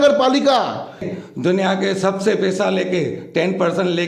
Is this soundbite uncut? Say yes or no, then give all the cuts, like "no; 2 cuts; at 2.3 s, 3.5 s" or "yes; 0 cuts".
no; 1 cut; at 1.0 s